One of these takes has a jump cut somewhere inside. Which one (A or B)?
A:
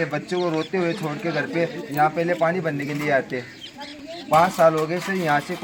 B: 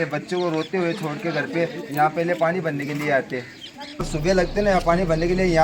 B